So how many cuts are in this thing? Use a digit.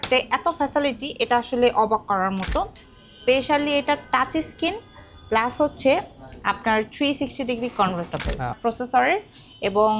2